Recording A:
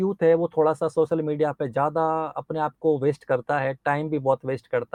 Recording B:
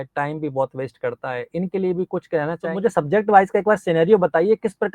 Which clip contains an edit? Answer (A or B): B